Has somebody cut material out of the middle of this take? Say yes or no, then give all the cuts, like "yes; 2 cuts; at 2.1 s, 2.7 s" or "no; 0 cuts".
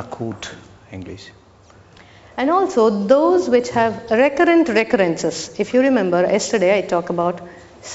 no; 0 cuts